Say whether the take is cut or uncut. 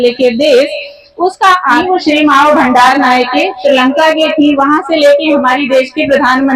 cut